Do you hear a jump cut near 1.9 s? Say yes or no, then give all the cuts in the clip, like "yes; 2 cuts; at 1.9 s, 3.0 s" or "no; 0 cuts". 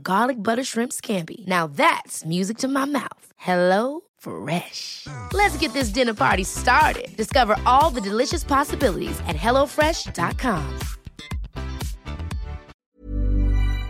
no; 1 cut; at 12.7 s